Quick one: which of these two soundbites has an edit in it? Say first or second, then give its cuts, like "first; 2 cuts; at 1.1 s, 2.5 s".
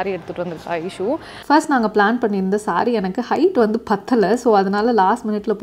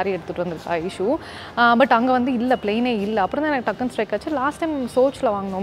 first; 1 cut; at 1.4 s